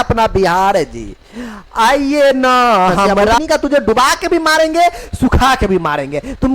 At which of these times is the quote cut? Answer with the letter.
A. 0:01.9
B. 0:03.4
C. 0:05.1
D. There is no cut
B